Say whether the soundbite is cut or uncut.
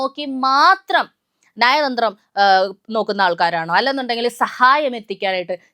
uncut